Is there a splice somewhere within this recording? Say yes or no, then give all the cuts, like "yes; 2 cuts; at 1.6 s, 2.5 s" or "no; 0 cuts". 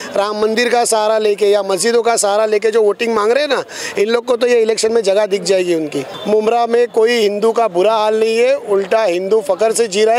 yes; 1 cut; at 6.1 s